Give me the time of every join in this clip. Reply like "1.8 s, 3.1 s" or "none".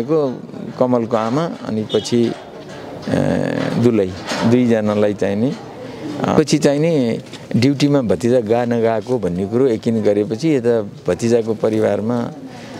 6.4 s